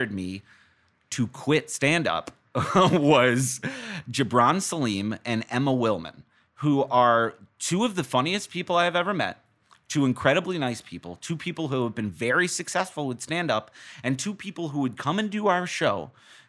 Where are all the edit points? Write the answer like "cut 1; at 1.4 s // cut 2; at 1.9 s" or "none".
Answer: none

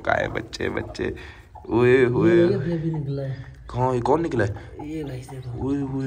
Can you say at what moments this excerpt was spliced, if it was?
none

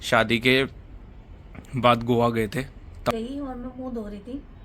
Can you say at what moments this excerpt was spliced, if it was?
cut 1; at 3.1 s

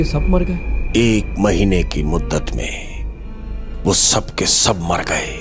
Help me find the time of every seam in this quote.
none

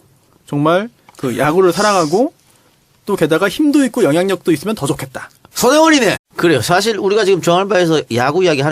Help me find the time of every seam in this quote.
none

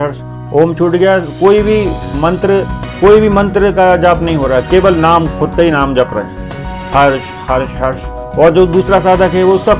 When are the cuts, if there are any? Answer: cut 1; at 2.8 s

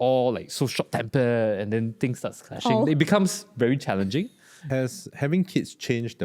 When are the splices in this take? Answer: cut 1; at 4.6 s

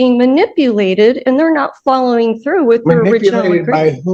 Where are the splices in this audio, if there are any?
none

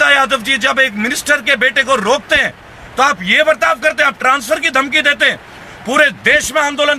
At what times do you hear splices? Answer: none

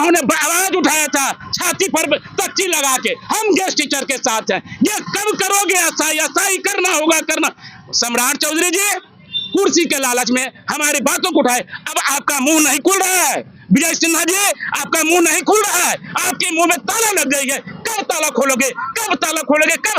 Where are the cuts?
none

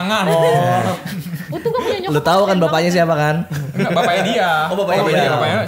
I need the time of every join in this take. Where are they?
none

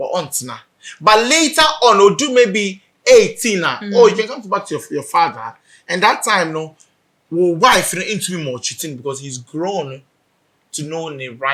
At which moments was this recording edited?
none

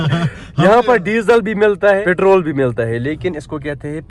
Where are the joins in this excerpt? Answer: cut 1; at 2.0 s

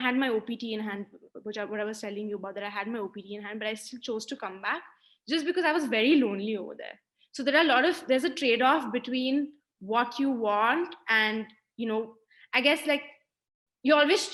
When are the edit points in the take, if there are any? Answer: none

